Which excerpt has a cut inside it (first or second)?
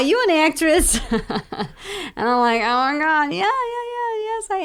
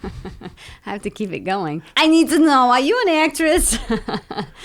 second